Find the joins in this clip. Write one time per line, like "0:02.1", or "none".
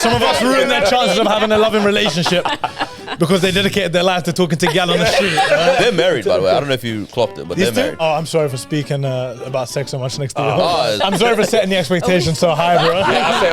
0:05.8
0:08.0
0:11.0